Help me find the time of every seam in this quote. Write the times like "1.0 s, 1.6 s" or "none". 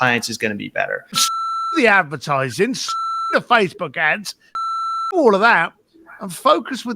1.3 s